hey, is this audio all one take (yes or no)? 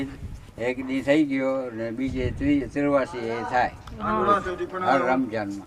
yes